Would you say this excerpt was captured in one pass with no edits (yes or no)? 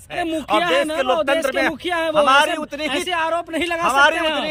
yes